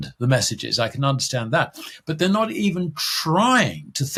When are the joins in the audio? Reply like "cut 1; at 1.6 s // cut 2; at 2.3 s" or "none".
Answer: none